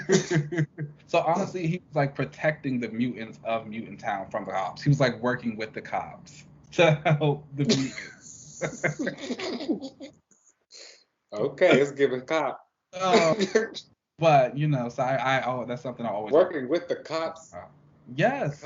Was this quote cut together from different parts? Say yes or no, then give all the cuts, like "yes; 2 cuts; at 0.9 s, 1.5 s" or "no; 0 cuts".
yes; 1 cut; at 0.9 s